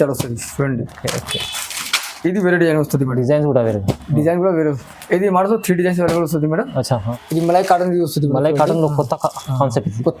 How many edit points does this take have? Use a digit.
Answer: 1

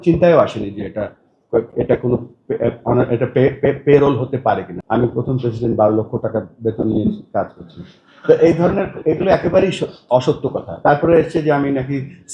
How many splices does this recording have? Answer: 1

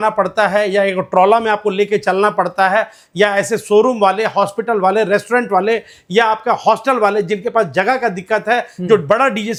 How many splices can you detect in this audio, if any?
0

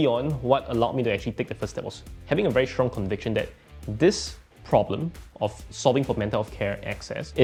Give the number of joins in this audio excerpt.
0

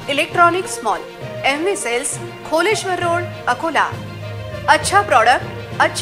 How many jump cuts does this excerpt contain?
0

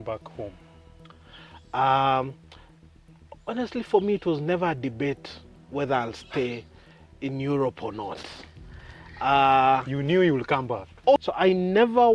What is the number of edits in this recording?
1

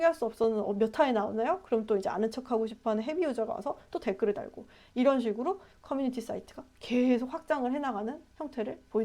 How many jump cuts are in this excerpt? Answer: 0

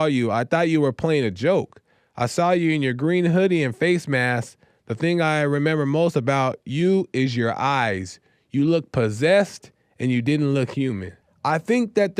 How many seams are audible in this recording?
1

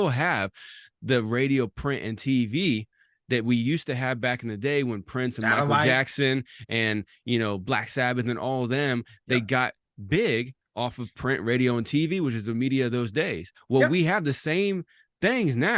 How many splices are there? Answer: 0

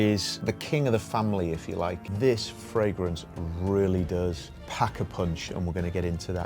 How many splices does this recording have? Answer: 1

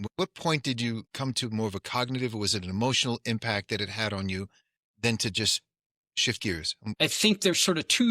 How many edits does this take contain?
2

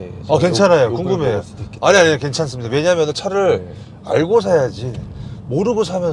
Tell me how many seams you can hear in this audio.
0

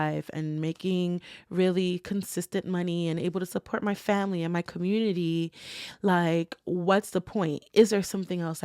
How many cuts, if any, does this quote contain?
0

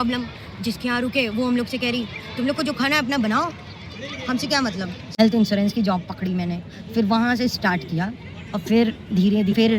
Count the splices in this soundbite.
1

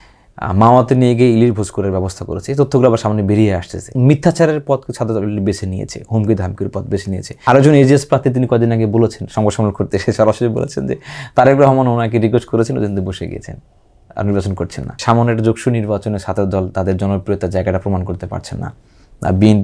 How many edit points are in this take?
3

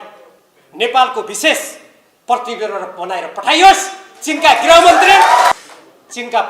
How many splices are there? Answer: 1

